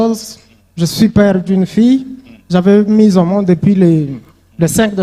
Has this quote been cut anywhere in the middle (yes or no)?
no